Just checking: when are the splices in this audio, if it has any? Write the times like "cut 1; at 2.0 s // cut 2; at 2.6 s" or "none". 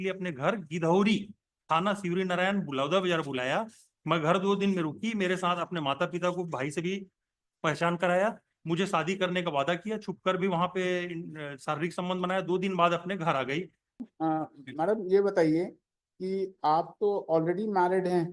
cut 1; at 14.1 s